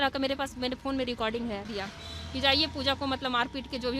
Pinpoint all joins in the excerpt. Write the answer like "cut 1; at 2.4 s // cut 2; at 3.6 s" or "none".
cut 1; at 1.6 s